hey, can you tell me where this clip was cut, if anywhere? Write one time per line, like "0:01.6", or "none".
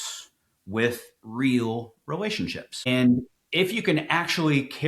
0:02.9